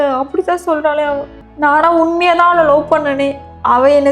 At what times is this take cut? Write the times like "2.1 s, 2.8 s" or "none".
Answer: 1.4 s